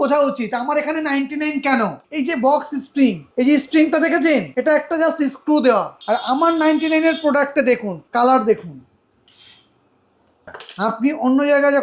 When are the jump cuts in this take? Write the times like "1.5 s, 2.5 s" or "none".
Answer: 2.0 s, 3.2 s, 4.5 s, 5.9 s, 7.9 s, 10.3 s